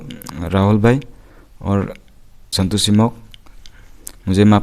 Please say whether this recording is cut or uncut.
cut